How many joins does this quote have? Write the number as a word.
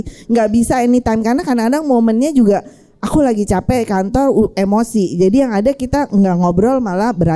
zero